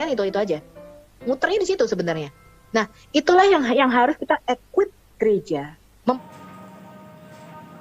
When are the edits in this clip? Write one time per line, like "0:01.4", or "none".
0:06.1